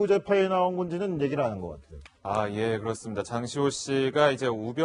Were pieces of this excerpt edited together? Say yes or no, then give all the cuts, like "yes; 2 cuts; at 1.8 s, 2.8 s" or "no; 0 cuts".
yes; 1 cut; at 1.3 s